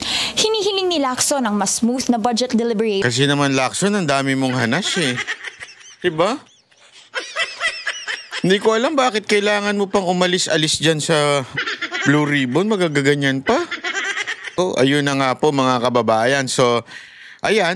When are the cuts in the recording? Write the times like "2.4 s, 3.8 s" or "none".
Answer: 14.5 s